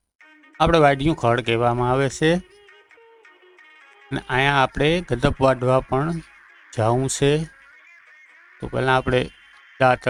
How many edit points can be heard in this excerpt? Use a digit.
0